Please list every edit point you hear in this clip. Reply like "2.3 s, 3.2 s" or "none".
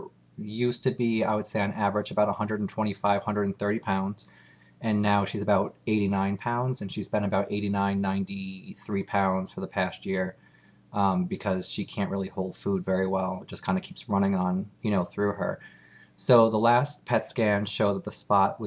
6.1 s